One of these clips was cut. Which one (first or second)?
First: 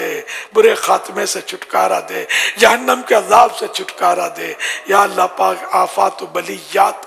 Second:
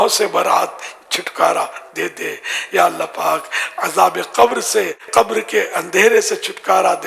second